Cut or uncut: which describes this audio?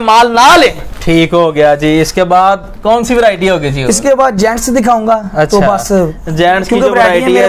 uncut